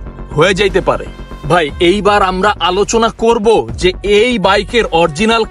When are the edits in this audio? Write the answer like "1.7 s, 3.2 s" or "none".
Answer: 1.2 s